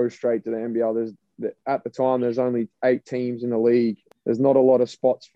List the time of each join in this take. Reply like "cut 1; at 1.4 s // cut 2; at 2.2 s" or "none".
cut 1; at 1.2 s // cut 2; at 4.1 s